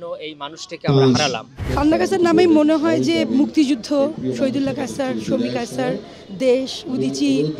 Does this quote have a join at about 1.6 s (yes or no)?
yes